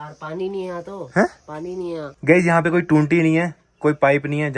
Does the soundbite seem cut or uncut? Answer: uncut